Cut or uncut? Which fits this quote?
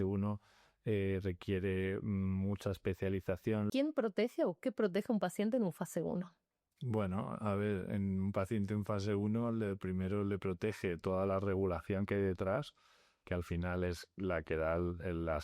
cut